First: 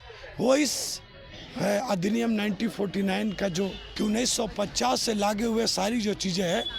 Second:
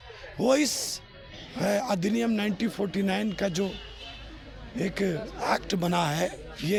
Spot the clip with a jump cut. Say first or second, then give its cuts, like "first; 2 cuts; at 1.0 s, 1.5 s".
first; 1 cut; at 3.8 s